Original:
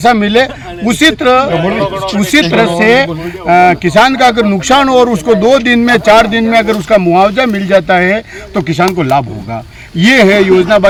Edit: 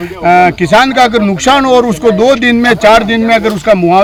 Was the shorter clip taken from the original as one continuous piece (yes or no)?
yes